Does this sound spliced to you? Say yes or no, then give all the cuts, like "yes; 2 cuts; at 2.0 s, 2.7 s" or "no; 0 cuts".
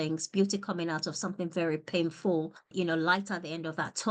yes; 1 cut; at 2.7 s